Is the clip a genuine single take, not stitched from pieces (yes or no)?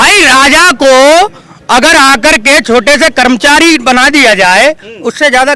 yes